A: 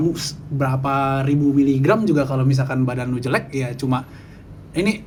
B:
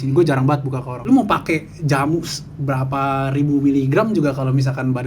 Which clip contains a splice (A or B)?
B